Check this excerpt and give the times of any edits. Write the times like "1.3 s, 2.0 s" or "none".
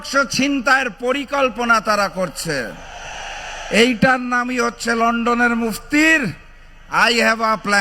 none